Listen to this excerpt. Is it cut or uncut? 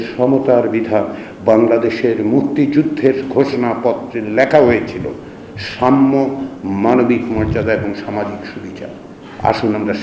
uncut